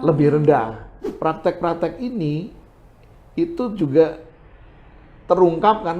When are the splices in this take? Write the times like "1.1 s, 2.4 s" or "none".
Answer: 1.0 s